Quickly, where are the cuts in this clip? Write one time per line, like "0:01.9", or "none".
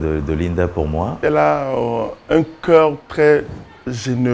0:01.2